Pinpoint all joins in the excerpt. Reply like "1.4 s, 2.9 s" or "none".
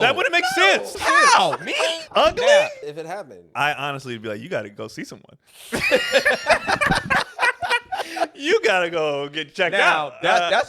0.9 s, 2.0 s, 2.8 s